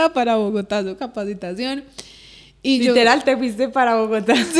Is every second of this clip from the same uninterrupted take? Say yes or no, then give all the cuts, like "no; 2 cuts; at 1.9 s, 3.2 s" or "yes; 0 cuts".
yes; 0 cuts